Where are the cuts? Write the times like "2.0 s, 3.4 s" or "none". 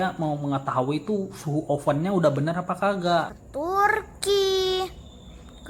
3.4 s